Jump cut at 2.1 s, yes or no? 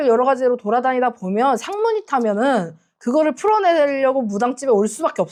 no